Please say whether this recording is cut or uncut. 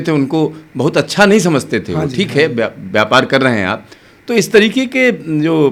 uncut